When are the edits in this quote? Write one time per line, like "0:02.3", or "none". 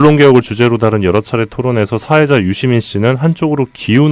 0:02.4